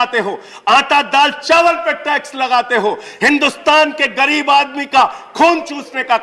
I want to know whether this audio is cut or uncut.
uncut